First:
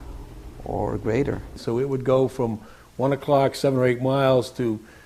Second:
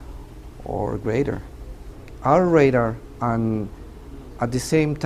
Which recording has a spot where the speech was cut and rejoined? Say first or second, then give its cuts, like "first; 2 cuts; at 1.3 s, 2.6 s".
first; 1 cut; at 1.5 s